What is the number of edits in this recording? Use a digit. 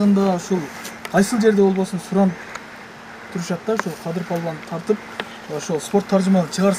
0